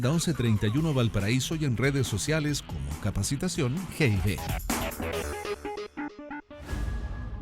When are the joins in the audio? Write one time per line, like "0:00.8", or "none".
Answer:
0:06.1